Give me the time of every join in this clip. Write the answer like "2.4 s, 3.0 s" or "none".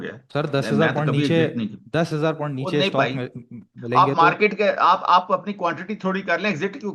none